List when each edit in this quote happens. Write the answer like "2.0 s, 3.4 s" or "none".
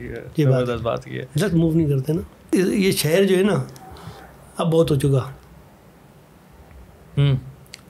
2.3 s